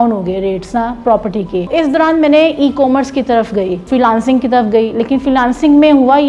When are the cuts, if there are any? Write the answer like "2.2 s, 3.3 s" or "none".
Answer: 1.7 s, 3.8 s